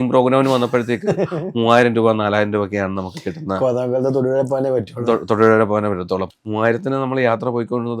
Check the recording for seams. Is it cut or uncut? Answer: cut